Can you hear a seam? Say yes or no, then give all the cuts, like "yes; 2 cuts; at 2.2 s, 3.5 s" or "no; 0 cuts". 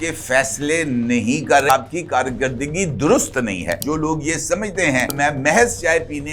yes; 3 cuts; at 1.7 s, 3.8 s, 5.1 s